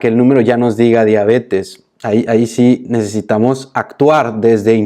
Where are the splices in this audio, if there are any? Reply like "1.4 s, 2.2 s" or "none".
none